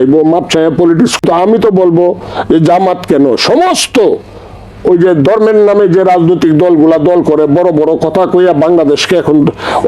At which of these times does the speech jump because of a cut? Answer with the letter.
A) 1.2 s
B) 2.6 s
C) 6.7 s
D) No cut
A